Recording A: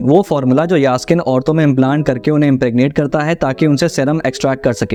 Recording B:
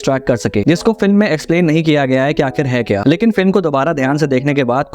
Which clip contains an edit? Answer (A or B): B